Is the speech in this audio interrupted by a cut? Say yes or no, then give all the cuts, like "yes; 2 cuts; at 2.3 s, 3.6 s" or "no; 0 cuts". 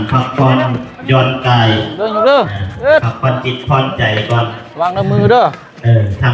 no; 0 cuts